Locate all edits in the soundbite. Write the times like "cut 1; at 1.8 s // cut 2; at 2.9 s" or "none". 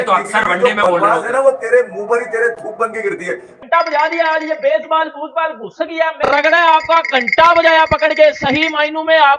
cut 1; at 3.6 s // cut 2; at 6.2 s